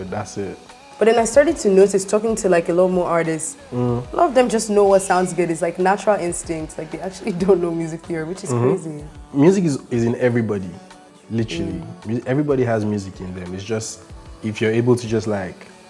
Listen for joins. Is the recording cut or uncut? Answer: uncut